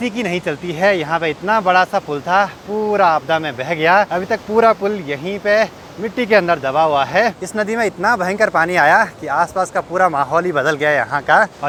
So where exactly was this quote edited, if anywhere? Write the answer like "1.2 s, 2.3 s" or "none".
none